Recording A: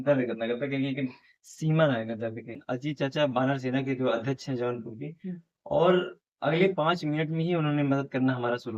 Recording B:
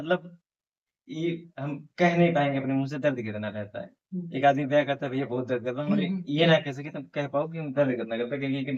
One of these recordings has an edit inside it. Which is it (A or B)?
A